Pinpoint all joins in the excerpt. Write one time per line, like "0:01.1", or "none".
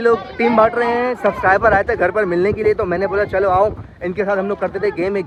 none